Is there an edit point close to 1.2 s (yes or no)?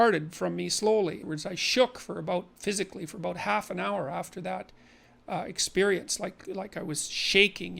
yes